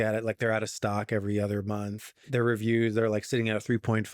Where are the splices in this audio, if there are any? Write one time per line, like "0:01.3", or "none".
0:02.2